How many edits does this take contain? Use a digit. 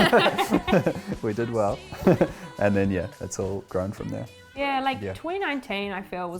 0